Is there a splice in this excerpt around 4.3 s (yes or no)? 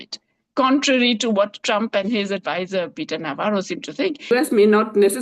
yes